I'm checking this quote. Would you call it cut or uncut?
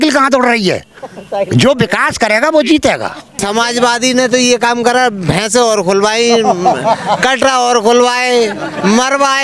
cut